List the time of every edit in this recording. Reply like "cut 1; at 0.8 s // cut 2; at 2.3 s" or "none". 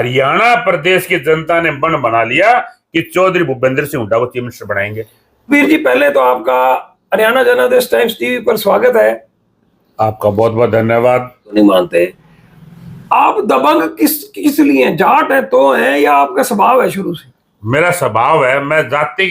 cut 1; at 5.5 s // cut 2; at 11.5 s